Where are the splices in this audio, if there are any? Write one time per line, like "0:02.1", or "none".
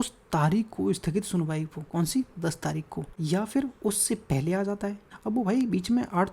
0:01.8
0:03.1
0:05.1